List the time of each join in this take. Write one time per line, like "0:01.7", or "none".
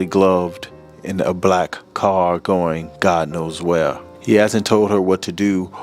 0:04.1